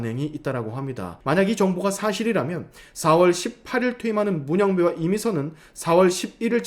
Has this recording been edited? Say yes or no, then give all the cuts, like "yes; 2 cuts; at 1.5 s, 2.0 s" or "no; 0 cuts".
yes; 1 cut; at 1.1 s